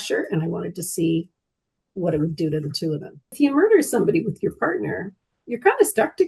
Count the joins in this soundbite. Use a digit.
1